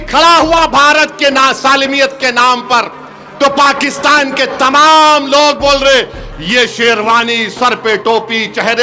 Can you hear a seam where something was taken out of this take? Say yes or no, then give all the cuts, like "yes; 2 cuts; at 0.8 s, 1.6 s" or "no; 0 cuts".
no; 0 cuts